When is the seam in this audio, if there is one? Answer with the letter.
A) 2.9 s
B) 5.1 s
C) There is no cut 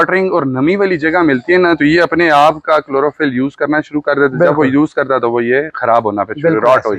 C